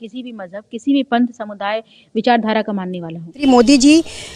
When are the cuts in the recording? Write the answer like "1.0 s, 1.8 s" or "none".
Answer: 3.4 s